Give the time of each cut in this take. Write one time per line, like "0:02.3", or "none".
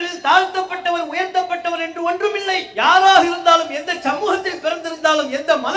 none